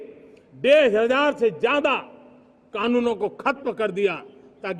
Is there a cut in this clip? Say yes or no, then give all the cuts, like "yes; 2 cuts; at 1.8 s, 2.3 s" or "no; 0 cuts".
no; 0 cuts